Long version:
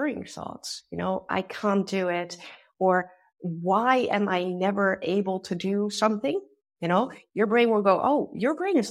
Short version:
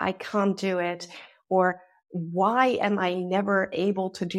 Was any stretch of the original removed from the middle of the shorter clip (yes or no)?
no